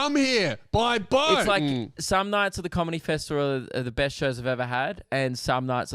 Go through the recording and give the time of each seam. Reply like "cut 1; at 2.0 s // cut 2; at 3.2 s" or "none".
cut 1; at 1.4 s